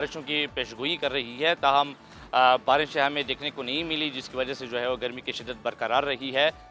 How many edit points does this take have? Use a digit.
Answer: 0